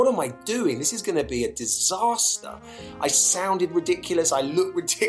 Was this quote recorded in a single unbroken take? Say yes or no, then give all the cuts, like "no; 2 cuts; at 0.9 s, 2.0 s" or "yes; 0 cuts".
yes; 0 cuts